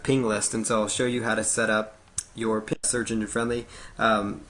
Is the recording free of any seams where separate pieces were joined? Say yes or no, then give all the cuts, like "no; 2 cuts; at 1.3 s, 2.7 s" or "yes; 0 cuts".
no; 1 cut; at 2.8 s